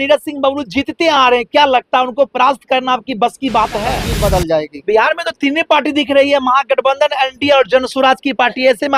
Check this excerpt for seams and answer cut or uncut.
cut